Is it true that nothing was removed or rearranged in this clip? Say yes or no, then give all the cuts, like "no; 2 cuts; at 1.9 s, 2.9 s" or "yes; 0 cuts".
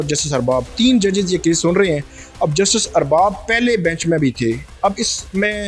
yes; 0 cuts